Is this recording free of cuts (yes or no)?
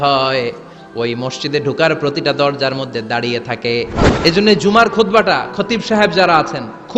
no